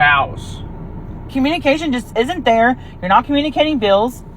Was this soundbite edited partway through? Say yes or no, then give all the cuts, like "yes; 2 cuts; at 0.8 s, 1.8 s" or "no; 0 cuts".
yes; 1 cut; at 1.2 s